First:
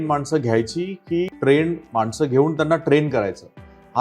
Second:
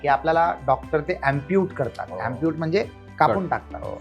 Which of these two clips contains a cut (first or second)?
first